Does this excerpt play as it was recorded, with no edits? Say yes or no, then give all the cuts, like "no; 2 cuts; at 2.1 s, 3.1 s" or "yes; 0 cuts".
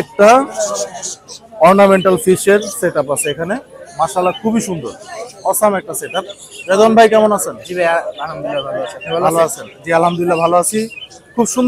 yes; 0 cuts